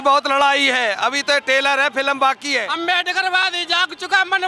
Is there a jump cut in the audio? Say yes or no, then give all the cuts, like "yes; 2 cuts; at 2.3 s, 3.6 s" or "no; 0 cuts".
yes; 1 cut; at 2.7 s